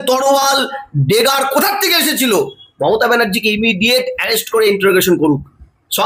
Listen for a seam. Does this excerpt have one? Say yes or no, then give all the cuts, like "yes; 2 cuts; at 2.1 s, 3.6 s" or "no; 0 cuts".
no; 0 cuts